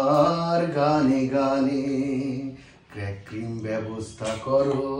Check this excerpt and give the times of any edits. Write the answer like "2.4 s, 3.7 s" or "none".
none